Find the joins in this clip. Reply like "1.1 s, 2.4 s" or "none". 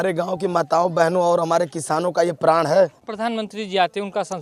3.1 s